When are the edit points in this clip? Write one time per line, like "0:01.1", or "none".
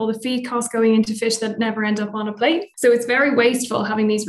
0:02.7